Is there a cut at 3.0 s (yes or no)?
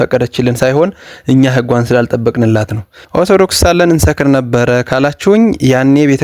yes